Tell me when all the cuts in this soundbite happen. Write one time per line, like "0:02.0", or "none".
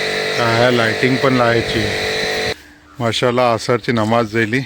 0:02.5

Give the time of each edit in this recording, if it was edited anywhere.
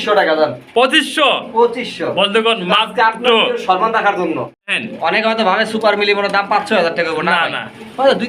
0:04.6

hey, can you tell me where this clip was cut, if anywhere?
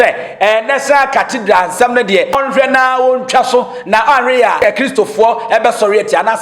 0:02.4
0:04.8

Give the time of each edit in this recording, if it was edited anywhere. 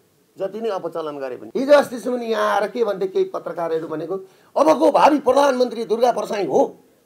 0:01.4

